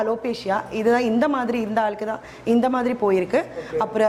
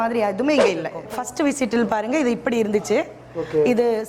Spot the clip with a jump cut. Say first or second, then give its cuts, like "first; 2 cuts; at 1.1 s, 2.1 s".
second; 1 cut; at 1.0 s